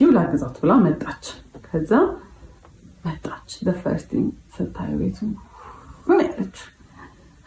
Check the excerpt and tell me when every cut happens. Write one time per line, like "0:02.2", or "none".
none